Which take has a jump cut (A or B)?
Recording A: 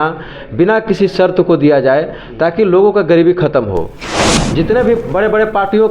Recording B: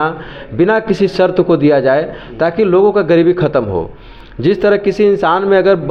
A